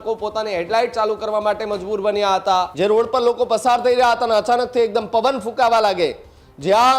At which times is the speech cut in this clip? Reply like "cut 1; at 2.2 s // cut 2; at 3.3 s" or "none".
cut 1; at 2.7 s